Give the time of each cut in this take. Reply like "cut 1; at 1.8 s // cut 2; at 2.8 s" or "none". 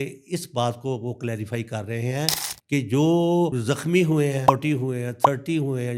none